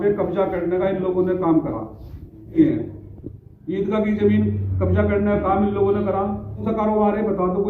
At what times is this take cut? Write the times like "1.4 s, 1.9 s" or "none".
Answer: 2.5 s, 6.7 s